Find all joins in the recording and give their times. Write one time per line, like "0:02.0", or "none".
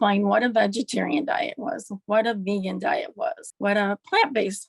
0:03.5